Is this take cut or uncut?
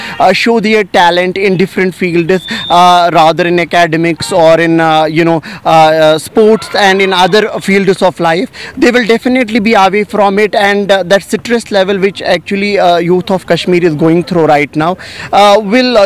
uncut